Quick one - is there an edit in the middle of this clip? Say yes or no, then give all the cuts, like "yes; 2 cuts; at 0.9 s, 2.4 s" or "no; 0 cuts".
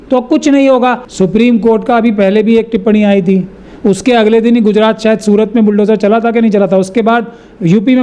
yes; 1 cut; at 1.0 s